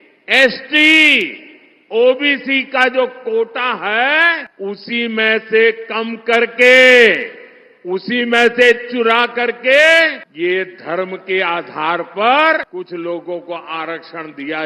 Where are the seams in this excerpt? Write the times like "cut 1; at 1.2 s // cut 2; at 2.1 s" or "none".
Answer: cut 1; at 4.5 s // cut 2; at 10.2 s // cut 3; at 12.7 s